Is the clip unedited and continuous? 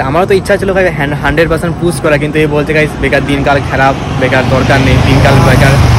yes; 0 cuts

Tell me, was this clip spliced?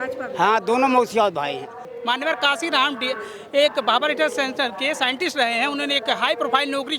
yes; 1 cut; at 1.9 s

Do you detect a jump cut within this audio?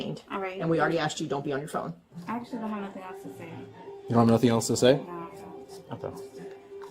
yes; 1 cut; at 2.0 s

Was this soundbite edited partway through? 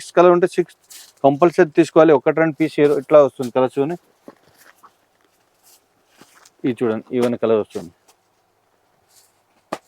no; 0 cuts

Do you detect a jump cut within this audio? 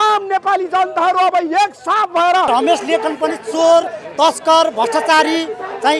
yes; 1 cut; at 2.5 s

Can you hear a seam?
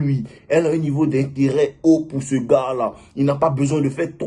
no; 0 cuts

